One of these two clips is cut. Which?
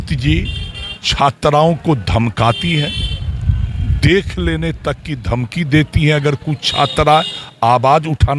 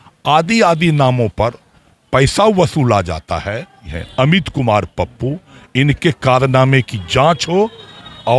second; 1 cut; at 4.0 s

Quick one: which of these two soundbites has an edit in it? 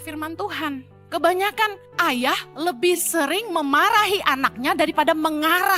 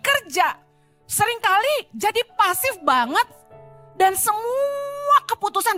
first; 2 cuts; at 0.9 s, 1.8 s

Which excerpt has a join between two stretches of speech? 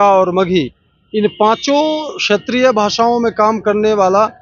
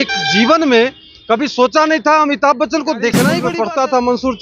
second; 1 cut; at 3.4 s

